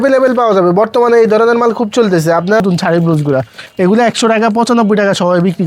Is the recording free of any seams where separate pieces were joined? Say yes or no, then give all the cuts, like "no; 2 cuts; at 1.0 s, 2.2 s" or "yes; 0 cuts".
no; 1 cut; at 2.6 s